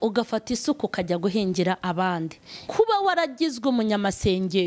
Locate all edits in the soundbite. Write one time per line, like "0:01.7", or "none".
0:02.6